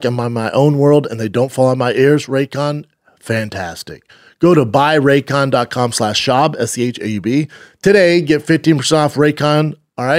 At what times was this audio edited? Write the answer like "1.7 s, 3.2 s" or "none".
none